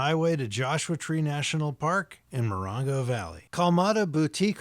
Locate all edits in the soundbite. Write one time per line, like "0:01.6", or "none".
0:03.4